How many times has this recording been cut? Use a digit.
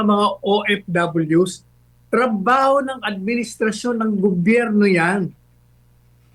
0